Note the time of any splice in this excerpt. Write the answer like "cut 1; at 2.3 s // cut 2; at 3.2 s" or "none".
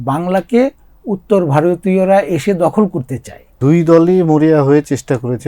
cut 1; at 3.5 s